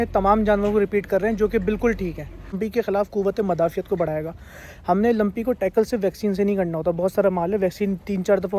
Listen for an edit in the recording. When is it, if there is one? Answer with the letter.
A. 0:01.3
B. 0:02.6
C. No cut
B